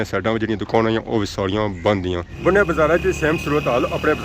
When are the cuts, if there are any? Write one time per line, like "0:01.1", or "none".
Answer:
0:02.3